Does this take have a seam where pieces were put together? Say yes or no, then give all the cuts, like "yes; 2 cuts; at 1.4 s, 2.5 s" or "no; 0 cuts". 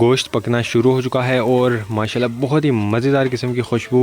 no; 0 cuts